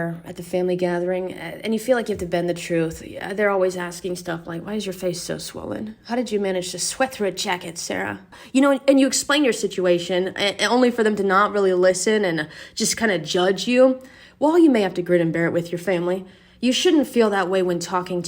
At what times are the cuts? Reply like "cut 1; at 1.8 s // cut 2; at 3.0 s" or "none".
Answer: cut 1; at 8.4 s